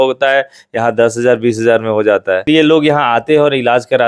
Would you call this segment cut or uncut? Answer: cut